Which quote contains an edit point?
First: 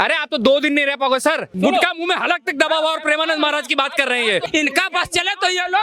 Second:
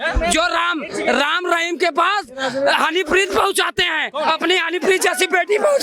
first; 2 cuts; at 1.5 s, 4.4 s

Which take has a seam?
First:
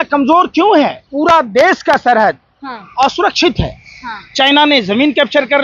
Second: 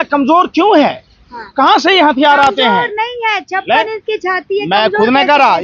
first; 1 cut; at 1.0 s

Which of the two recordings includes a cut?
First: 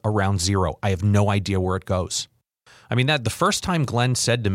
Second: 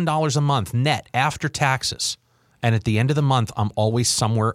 first; 1 cut; at 2.5 s

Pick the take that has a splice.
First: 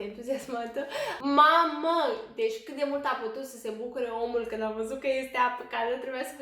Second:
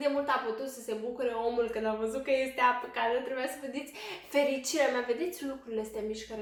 first; 1 cut; at 1.2 s

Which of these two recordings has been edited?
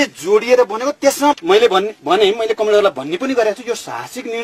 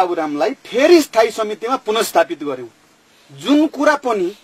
first; 1 cut; at 1.4 s

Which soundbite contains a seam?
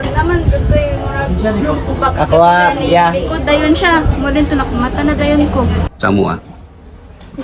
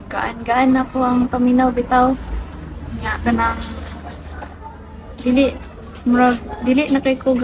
first; 1 cut; at 5.9 s

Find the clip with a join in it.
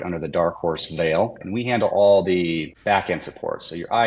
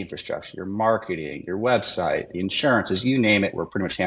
first; 2 cuts; at 1.4 s, 2.7 s

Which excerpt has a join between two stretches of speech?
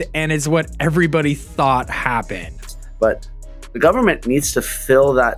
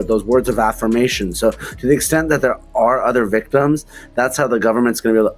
first; 1 cut; at 2.6 s

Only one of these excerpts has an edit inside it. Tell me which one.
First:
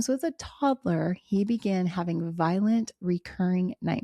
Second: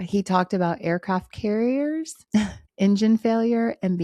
second; 1 cut; at 2.4 s

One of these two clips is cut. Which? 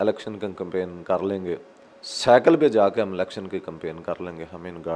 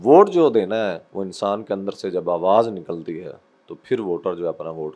second; 1 cut; at 1.1 s

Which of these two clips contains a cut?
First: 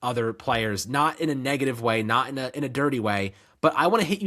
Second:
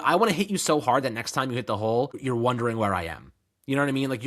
second; 1 cut; at 2.2 s

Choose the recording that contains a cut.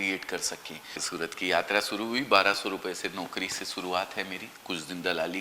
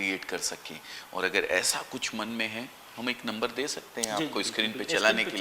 first; 1 cut; at 1.0 s

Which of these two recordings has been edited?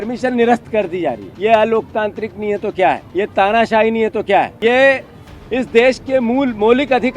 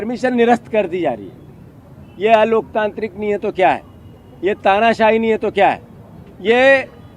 first; 3 cuts; at 1.3 s, 3.0 s, 4.5 s

